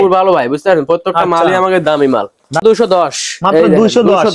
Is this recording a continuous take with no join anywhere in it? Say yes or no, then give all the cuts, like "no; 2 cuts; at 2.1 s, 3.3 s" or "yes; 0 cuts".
no; 1 cut; at 2.6 s